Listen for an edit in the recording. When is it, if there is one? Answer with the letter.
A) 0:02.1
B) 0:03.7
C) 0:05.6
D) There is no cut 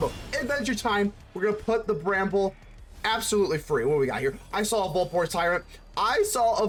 D